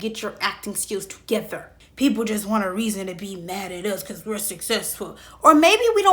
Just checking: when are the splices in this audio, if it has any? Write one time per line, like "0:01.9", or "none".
0:01.8